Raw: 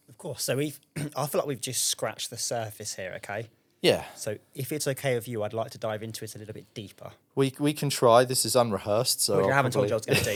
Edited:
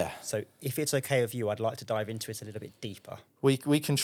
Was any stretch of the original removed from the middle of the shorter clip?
no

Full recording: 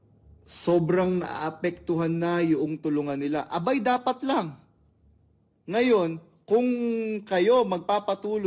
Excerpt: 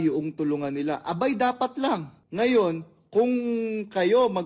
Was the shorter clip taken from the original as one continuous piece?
no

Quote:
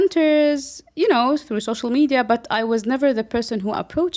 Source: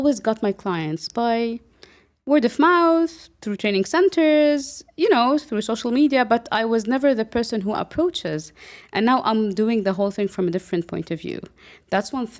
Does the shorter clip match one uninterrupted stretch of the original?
yes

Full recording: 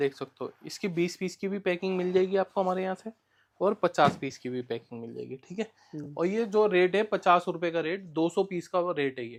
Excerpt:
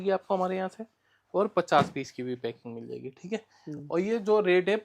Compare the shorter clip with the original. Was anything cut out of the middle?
no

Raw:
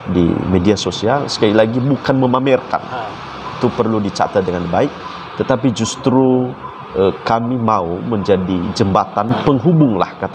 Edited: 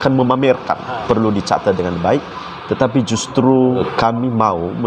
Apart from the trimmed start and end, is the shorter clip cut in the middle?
yes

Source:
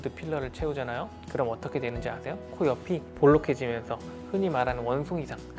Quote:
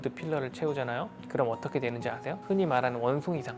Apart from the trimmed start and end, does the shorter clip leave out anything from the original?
yes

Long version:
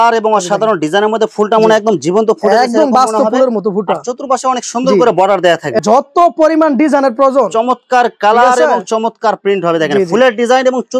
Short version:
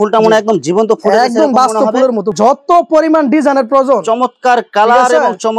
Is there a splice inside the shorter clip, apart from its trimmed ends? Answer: yes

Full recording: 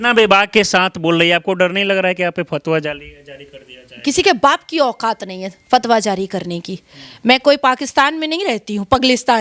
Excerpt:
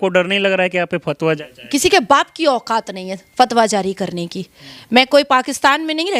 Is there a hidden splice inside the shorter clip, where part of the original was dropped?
yes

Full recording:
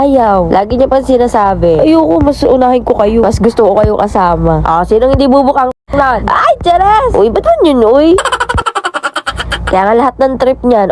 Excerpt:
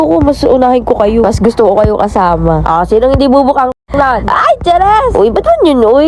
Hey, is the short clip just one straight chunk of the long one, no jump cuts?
yes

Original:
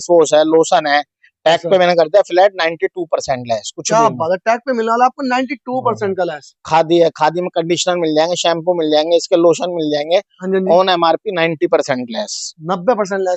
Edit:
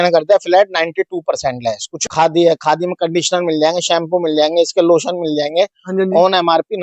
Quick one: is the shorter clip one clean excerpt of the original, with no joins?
no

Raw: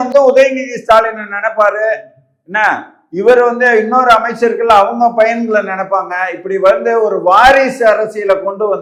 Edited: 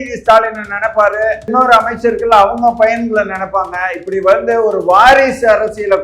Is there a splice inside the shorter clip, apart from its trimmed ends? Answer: yes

